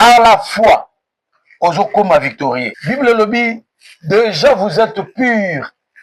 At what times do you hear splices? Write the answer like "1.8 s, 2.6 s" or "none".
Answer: 2.7 s